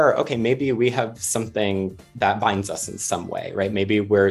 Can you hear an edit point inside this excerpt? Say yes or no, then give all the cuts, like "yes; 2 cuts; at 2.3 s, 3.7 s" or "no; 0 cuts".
no; 0 cuts